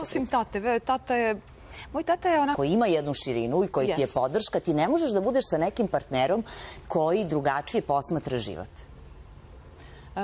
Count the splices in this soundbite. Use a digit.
1